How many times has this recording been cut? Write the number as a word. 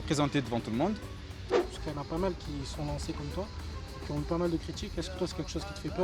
one